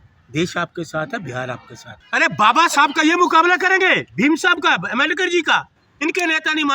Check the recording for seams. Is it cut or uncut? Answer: cut